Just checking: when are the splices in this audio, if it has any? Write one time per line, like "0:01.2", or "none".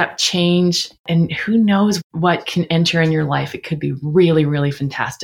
0:01.0